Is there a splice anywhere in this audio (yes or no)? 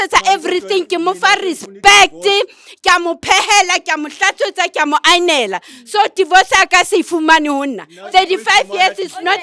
no